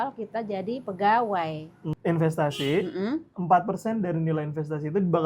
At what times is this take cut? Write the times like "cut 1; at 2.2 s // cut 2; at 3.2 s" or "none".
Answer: cut 1; at 1.9 s